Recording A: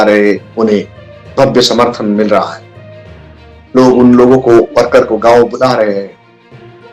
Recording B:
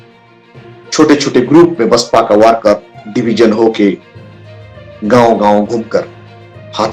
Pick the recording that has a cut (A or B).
B